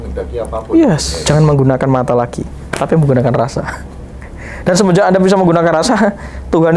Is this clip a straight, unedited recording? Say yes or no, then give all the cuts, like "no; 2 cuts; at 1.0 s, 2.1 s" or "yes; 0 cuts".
no; 1 cut; at 1.1 s